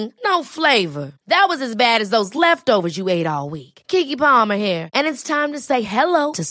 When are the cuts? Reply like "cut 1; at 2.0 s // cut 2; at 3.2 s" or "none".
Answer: none